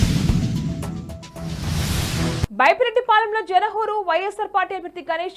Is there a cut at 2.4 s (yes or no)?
yes